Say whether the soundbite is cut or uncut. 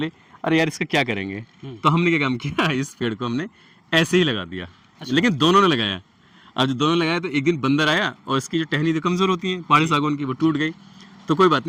uncut